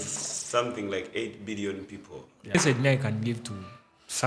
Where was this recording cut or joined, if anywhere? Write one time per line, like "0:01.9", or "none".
0:02.5